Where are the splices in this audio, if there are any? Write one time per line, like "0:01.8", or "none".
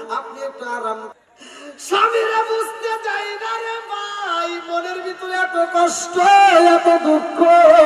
0:01.1